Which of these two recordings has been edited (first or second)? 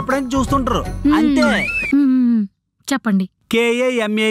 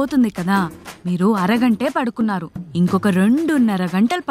first